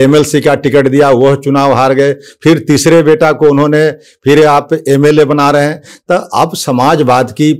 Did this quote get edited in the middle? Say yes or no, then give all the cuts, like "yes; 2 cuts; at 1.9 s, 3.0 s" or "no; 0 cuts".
no; 0 cuts